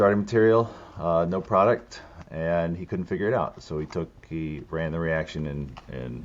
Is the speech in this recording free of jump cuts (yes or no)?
yes